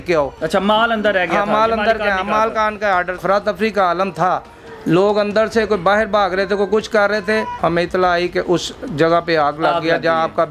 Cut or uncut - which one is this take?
cut